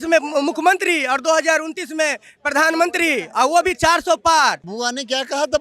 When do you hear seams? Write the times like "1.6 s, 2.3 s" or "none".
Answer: 4.7 s